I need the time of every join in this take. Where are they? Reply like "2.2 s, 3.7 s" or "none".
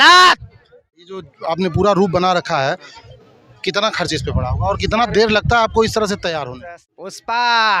1.3 s, 6.5 s